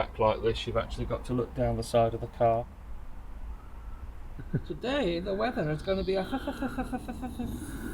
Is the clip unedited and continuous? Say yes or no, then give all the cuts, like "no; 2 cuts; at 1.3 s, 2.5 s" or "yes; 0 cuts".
no; 2 cuts; at 2.6 s, 4.5 s